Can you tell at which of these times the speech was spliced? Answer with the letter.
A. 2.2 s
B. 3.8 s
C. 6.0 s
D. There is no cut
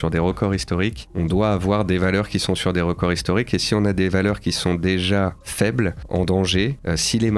D